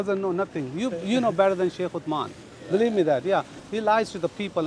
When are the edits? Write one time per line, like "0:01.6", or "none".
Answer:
0:03.6